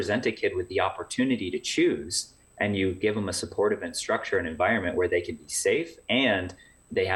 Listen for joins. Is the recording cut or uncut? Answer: uncut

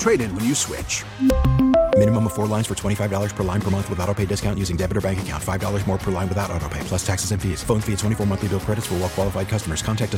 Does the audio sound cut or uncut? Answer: uncut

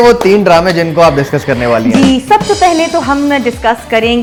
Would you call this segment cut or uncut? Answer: uncut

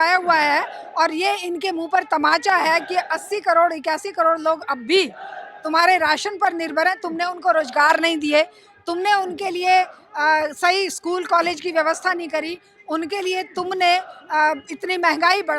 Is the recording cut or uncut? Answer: uncut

